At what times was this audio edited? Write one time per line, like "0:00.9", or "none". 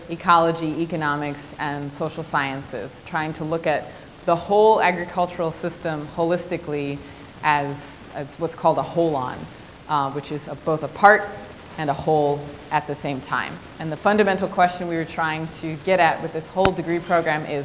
0:10.2